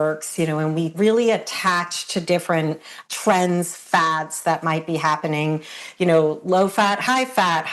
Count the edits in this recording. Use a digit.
3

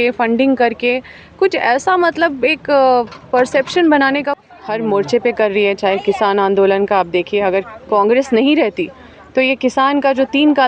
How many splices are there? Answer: 1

